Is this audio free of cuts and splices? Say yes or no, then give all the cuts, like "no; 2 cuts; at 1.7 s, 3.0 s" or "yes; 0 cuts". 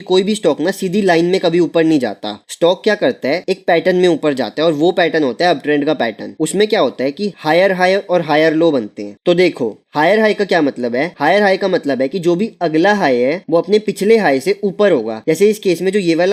yes; 0 cuts